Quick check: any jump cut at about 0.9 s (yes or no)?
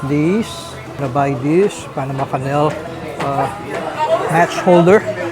yes